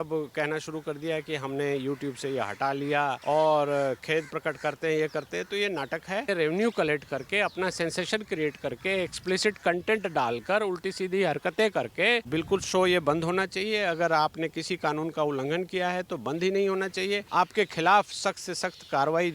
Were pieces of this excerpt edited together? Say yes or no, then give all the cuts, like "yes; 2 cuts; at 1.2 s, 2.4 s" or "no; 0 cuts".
yes; 4 cuts; at 3.2 s, 6.3 s, 12.3 s, 17.3 s